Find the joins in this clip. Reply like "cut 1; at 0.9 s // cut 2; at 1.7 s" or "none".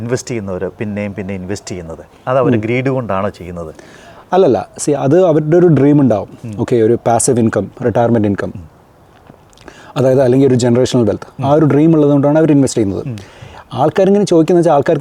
none